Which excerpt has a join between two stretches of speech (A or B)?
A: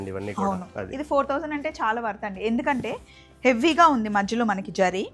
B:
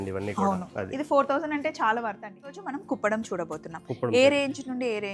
B